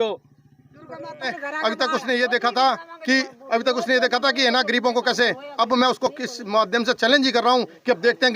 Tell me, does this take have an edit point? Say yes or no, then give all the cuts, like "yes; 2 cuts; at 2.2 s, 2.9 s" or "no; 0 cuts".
yes; 1 cut; at 1.4 s